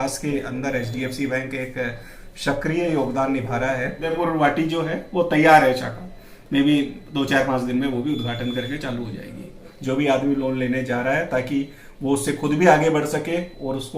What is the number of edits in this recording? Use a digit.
2